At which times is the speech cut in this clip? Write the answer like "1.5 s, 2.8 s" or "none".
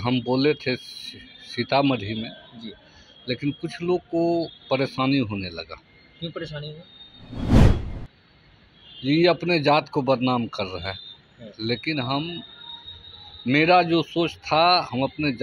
none